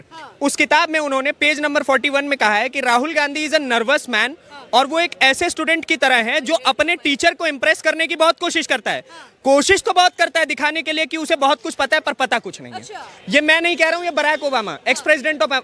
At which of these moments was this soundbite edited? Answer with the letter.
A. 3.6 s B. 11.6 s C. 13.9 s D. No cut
D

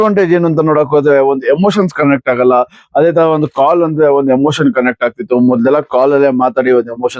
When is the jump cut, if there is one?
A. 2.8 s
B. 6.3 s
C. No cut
B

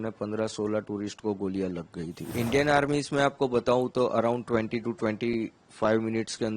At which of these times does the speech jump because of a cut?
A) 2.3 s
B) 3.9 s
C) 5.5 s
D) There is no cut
A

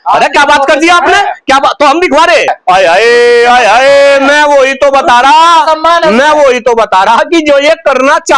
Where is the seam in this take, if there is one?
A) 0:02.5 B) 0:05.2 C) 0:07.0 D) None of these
A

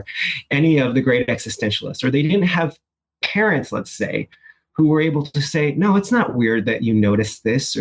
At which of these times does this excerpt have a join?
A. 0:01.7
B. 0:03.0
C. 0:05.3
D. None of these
D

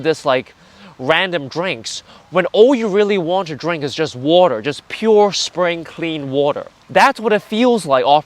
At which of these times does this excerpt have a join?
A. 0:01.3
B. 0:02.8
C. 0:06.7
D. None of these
C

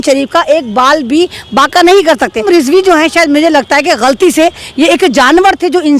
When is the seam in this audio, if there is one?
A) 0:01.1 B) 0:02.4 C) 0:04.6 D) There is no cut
B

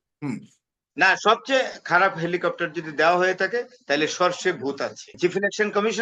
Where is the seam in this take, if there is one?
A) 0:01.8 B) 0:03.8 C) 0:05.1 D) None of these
C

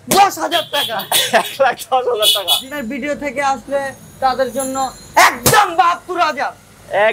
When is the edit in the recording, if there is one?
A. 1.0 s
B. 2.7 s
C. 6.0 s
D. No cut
B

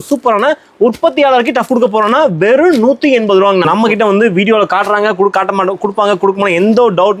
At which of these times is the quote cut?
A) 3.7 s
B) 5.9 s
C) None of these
A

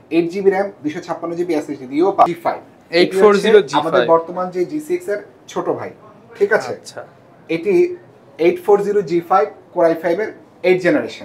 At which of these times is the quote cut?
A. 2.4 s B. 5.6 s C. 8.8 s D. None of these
A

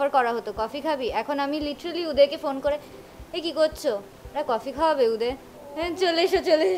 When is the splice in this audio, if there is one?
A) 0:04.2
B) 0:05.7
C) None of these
C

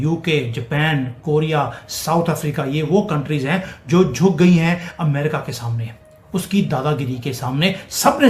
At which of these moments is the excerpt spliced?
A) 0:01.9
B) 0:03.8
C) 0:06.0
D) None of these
D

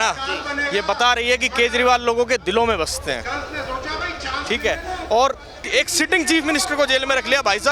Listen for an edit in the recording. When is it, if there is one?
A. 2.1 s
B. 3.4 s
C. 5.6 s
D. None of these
C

